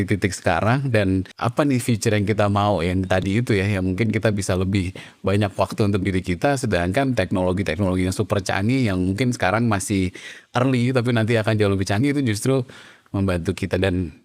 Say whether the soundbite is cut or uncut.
cut